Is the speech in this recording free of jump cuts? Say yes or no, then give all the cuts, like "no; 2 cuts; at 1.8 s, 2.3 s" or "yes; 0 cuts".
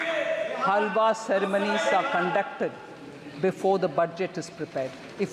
yes; 0 cuts